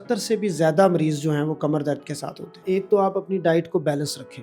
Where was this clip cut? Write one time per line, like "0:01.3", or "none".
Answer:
0:02.6